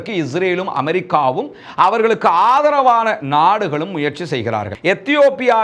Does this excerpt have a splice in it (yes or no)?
yes